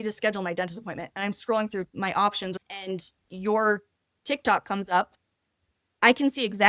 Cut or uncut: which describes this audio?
cut